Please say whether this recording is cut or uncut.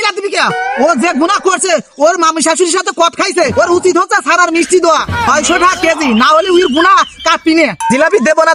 uncut